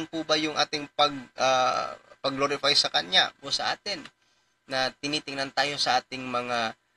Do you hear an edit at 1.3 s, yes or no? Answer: no